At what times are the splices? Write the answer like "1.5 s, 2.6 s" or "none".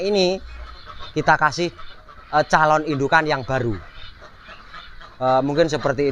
none